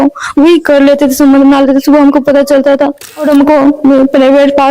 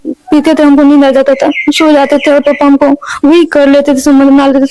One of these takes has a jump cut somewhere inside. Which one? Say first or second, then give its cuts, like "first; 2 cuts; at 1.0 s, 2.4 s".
first; 1 cut; at 3.3 s